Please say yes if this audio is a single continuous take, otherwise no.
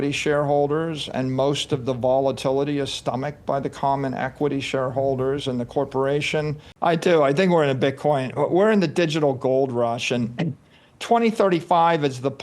no